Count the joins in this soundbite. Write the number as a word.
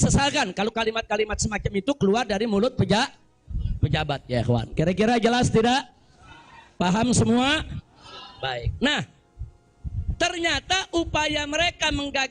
zero